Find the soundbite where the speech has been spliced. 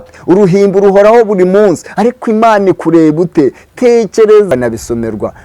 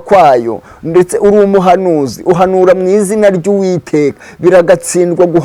first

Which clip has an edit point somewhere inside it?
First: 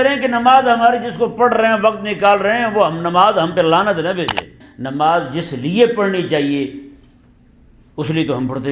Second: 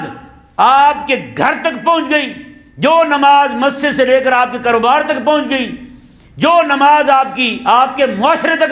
first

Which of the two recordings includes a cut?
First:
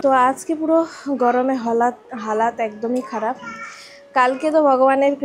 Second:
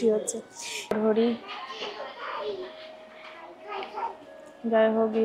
second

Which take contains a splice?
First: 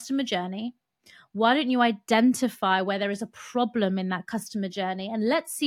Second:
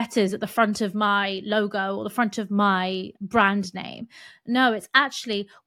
second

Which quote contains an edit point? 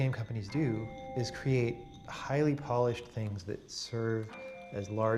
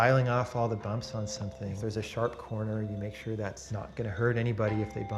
second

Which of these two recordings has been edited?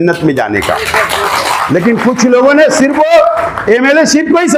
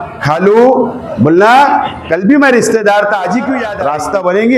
second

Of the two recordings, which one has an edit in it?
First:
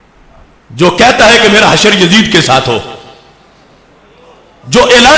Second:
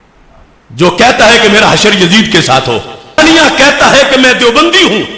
second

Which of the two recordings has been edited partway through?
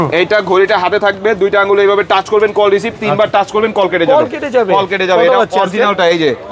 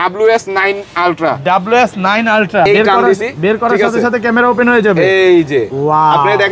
second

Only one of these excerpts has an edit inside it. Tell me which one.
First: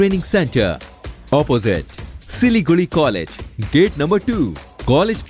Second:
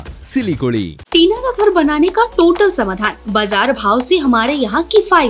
second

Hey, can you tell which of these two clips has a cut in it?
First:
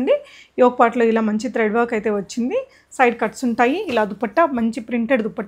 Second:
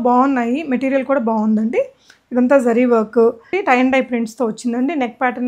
second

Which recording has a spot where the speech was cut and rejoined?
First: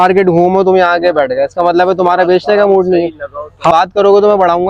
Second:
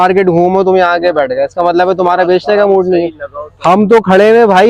first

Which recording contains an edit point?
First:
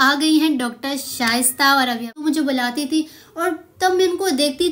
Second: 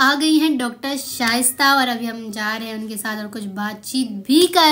first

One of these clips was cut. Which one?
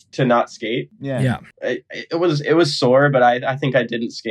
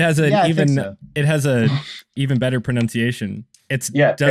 second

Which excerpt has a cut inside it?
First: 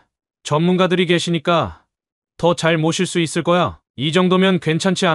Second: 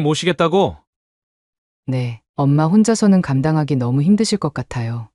first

